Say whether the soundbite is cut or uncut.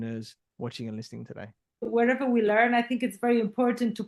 cut